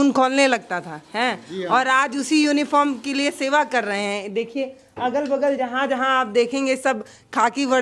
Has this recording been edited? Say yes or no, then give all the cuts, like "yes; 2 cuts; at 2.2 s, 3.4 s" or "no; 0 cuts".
no; 0 cuts